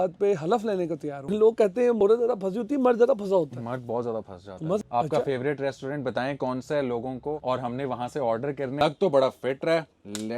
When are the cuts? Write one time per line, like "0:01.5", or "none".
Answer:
0:01.2
0:04.8
0:08.8